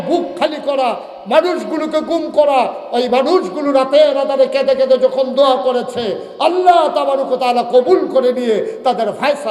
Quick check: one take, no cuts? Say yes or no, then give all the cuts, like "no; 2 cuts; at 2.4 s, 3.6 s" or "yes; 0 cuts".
yes; 0 cuts